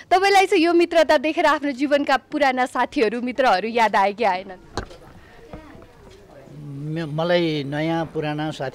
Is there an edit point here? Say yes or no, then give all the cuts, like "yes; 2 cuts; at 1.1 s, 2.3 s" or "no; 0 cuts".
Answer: no; 0 cuts